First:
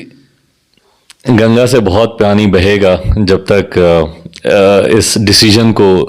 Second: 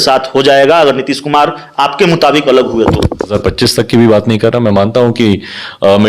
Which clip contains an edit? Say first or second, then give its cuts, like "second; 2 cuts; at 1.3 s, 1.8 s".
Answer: second; 1 cut; at 3.4 s